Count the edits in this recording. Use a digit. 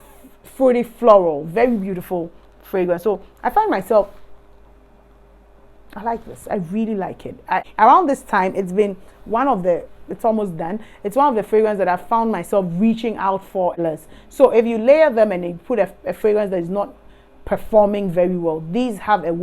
2